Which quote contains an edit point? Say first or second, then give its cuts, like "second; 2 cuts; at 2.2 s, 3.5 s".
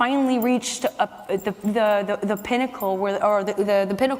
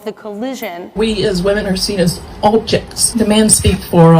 second; 2 cuts; at 1.0 s, 3.0 s